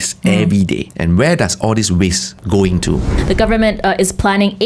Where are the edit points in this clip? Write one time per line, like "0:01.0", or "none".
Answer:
0:00.9
0:02.3
0:03.1